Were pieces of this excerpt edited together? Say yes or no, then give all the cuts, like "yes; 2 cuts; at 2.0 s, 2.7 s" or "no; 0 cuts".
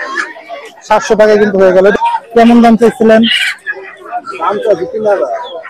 yes; 1 cut; at 1.9 s